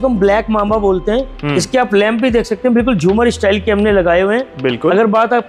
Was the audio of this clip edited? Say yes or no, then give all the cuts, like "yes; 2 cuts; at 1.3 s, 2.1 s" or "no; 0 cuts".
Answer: no; 0 cuts